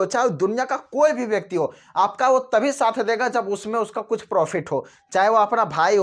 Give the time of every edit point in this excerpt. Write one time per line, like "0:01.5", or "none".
none